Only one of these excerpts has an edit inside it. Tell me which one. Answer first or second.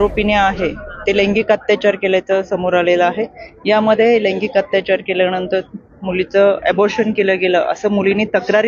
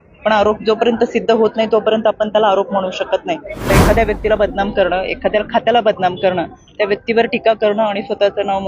second